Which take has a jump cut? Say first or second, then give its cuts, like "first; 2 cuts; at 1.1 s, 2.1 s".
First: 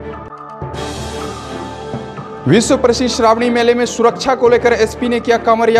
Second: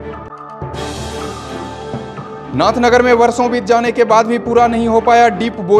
second; 1 cut; at 2.3 s